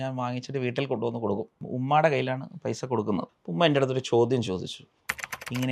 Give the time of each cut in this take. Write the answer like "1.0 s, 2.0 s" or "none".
1.6 s, 3.4 s